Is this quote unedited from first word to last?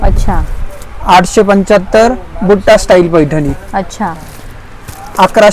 yes; 0 cuts

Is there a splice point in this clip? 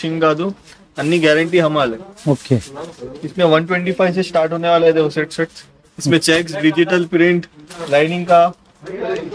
no; 0 cuts

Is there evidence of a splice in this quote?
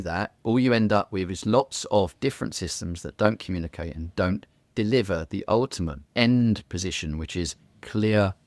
no; 0 cuts

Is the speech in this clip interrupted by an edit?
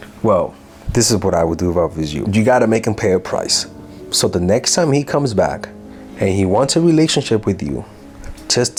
no; 0 cuts

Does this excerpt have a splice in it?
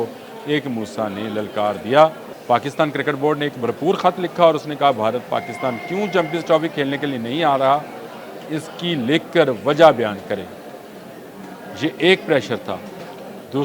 yes; 1 cut; at 2.3 s

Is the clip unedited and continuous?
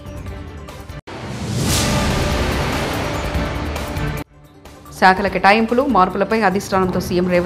no; 2 cuts; at 1.0 s, 3.9 s

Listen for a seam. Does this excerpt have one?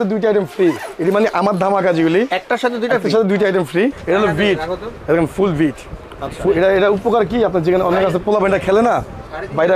yes; 1 cut; at 4.0 s

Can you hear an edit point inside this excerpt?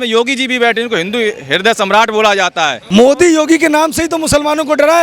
yes; 1 cut; at 2.8 s

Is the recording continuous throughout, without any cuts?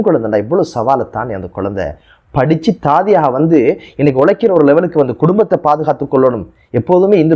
yes; 0 cuts

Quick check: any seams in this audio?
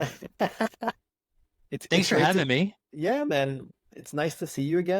yes; 1 cut; at 3.6 s

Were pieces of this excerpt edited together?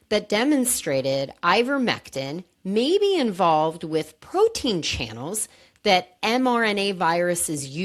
no; 0 cuts

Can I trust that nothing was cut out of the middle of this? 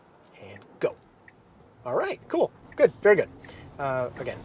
yes; 0 cuts

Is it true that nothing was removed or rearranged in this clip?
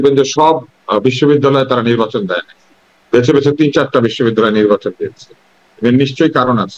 yes; 0 cuts

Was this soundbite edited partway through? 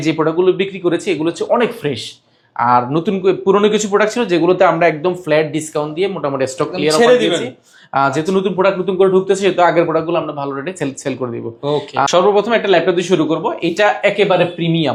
no; 0 cuts

